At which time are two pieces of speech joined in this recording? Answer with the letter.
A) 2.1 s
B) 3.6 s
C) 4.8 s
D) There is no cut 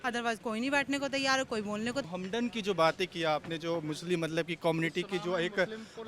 A